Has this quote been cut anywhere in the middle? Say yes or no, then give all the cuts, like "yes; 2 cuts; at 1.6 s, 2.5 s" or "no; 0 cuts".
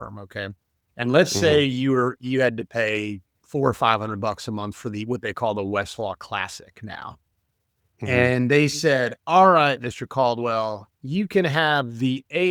no; 0 cuts